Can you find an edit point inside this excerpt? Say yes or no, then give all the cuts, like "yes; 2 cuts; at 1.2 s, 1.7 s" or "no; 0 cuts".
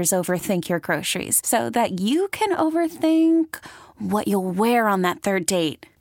no; 0 cuts